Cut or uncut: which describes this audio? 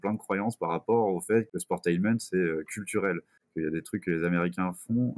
cut